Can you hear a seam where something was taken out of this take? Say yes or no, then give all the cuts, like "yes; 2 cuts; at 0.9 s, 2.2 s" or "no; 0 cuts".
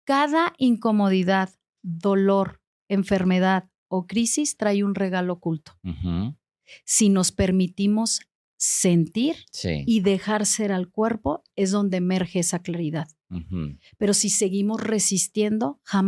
no; 0 cuts